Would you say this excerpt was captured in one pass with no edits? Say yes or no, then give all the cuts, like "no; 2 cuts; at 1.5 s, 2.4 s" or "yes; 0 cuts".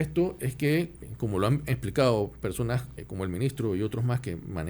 no; 2 cuts; at 1.1 s, 3.0 s